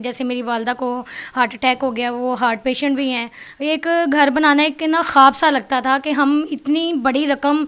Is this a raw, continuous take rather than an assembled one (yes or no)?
no